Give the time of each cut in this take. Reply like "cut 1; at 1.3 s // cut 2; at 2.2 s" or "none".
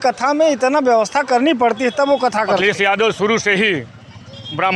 cut 1; at 2.6 s

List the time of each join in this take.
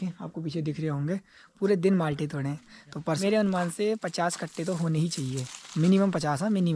cut 1; at 3.2 s

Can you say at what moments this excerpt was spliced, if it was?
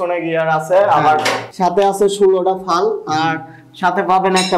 cut 1; at 1.4 s

